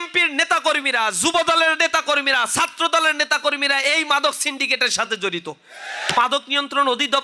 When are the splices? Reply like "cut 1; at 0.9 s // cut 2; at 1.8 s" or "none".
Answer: cut 1; at 6.1 s